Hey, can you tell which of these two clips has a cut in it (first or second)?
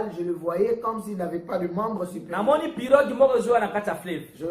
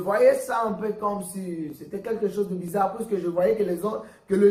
first